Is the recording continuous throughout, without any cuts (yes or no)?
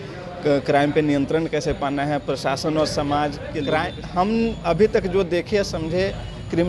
no